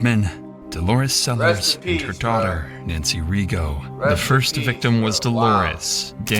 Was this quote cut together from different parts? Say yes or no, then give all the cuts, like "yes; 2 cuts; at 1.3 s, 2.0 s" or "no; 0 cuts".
no; 0 cuts